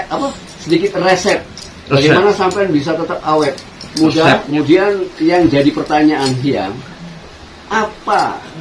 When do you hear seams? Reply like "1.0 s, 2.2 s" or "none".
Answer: 4.5 s